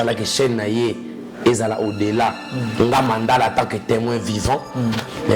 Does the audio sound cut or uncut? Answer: uncut